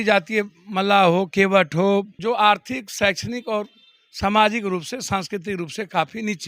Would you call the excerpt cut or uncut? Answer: cut